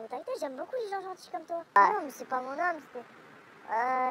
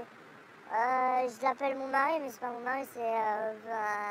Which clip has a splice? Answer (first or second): first